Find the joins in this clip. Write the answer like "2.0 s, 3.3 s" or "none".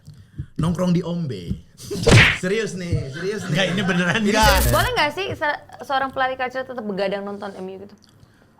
4.7 s